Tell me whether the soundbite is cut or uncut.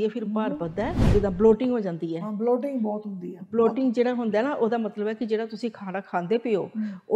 cut